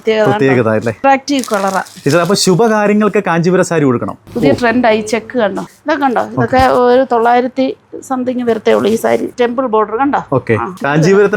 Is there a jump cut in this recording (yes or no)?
yes